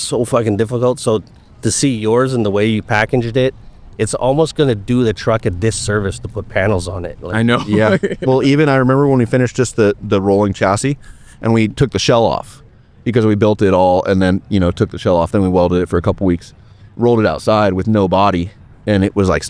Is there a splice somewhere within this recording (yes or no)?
no